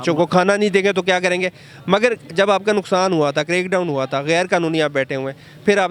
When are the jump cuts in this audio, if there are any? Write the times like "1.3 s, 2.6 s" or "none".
none